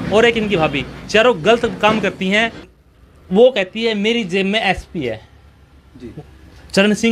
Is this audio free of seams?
no; 1 cut; at 2.6 s

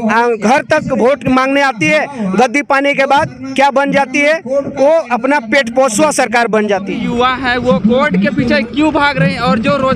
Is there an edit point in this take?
yes; 1 cut; at 7.0 s

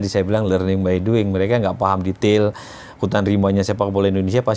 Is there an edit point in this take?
no; 0 cuts

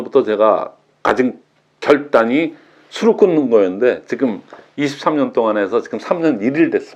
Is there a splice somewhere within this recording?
no; 0 cuts

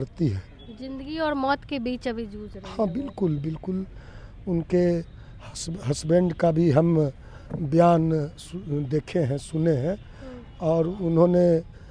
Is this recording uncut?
yes; 0 cuts

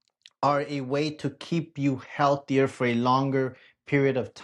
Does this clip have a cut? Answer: no; 0 cuts

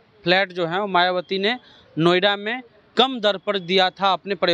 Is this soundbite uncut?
yes; 0 cuts

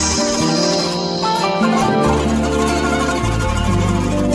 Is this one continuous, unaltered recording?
yes; 0 cuts

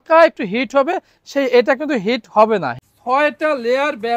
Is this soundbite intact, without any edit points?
no; 1 cut; at 2.7 s

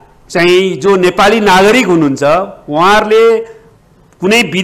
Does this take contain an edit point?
no; 0 cuts

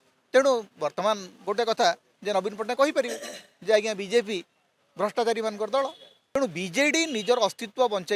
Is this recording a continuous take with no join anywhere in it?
no; 1 cut; at 6.4 s

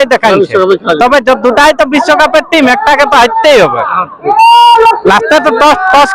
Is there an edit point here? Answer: no; 0 cuts

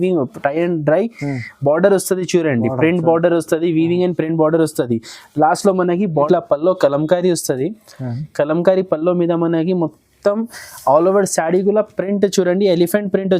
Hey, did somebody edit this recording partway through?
yes; 1 cut; at 6.3 s

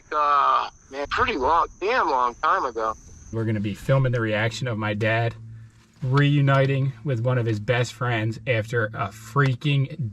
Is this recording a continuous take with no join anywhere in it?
no; 2 cuts; at 1.1 s, 3.3 s

